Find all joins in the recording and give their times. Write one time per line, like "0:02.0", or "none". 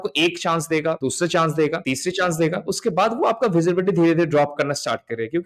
0:01.0
0:01.8

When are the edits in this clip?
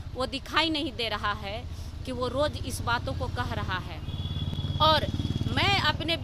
none

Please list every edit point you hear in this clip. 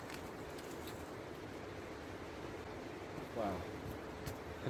none

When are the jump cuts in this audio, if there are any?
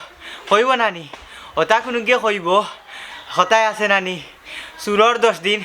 none

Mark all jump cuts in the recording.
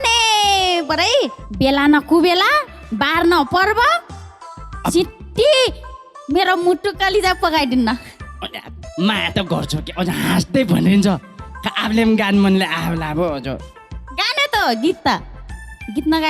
0:01.4

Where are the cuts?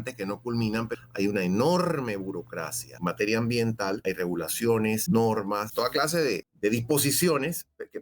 0:00.9
0:02.9
0:04.0
0:05.0
0:06.0

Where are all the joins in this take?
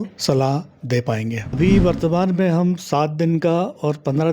0:01.6

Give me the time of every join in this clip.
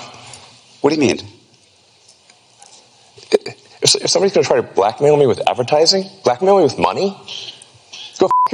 none

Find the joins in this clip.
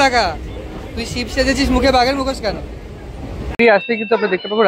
0:03.5

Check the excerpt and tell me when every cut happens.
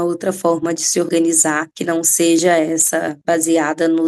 0:01.7
0:03.1

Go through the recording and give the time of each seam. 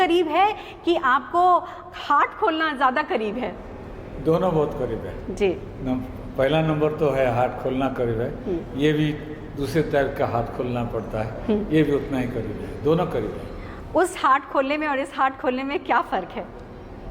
none

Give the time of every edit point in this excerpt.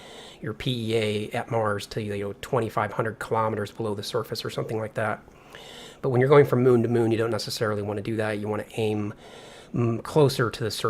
0:06.9

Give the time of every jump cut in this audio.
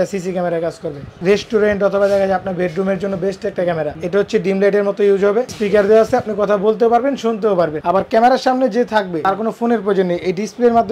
0:01.2
0:04.0
0:05.5
0:07.8
0:09.1

